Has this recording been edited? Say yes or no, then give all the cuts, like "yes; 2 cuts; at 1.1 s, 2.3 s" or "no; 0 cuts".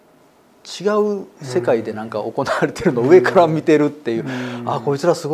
no; 0 cuts